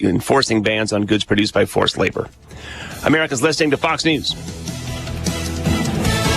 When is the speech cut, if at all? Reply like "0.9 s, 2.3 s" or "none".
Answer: 4.4 s